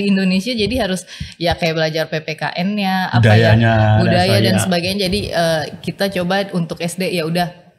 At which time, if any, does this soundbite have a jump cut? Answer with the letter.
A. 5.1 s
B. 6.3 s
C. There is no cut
C